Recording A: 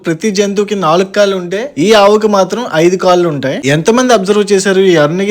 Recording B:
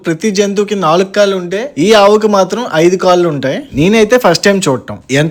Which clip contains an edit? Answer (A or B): A